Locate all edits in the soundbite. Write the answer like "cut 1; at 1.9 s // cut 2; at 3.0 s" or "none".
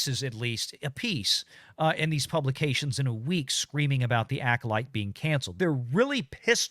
cut 1; at 5.5 s